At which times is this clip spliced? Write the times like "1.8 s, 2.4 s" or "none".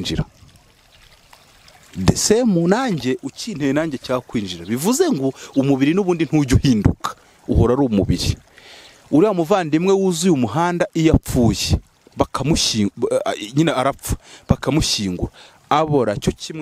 none